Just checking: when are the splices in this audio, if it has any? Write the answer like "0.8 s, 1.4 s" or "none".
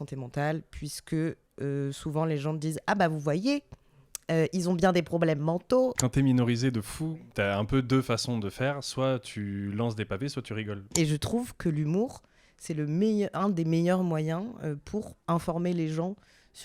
6.0 s, 7.1 s, 10.9 s, 15.1 s